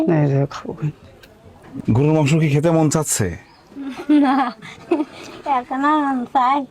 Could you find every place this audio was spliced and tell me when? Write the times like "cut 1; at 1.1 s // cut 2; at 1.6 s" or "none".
cut 1; at 1.6 s